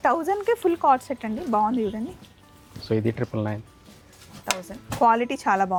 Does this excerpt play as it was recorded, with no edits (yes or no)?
yes